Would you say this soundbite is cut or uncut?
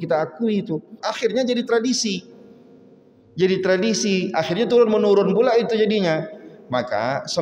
cut